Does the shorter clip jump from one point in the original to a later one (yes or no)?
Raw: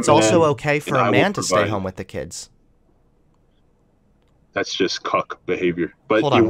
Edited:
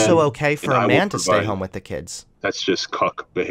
yes